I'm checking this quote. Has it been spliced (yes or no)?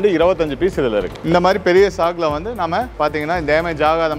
yes